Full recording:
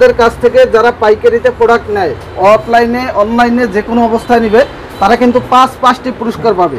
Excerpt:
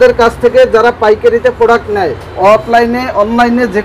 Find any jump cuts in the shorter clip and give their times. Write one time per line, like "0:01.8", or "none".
none